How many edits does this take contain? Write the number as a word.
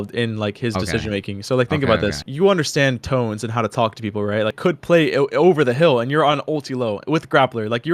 two